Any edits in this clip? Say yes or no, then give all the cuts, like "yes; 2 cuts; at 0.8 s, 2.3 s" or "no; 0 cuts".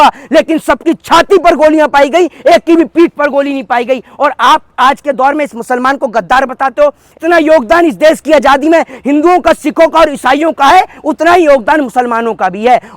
yes; 1 cut; at 7.1 s